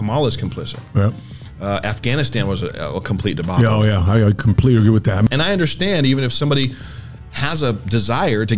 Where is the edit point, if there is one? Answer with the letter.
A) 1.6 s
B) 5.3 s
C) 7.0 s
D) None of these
B